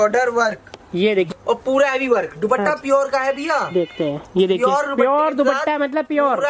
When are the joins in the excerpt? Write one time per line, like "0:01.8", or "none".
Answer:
0:01.3